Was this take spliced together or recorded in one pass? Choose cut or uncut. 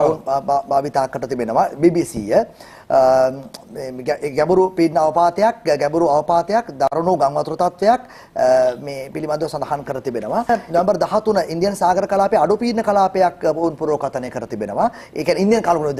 cut